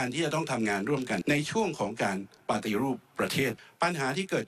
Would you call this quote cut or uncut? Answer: cut